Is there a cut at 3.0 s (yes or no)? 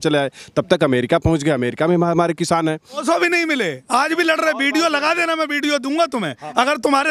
yes